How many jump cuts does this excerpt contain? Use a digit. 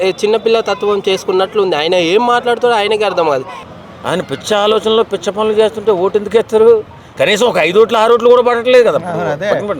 1